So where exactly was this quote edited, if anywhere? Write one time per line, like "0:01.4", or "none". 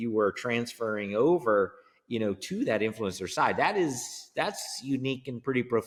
none